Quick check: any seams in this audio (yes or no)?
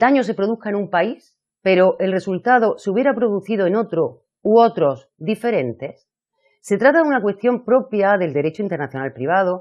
yes